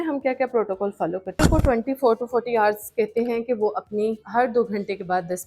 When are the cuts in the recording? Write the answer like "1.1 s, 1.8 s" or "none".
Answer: 1.4 s